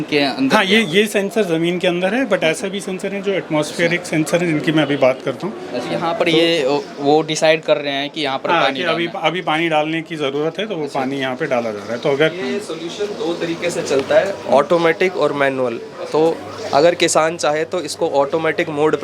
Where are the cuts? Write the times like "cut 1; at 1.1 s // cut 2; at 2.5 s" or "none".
cut 1; at 6.1 s